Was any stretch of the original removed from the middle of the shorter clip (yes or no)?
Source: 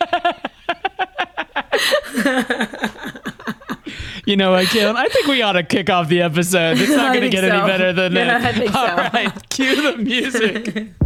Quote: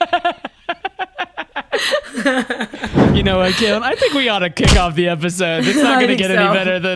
yes